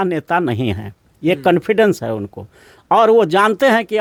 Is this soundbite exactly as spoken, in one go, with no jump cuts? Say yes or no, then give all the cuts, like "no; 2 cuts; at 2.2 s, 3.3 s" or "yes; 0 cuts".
yes; 0 cuts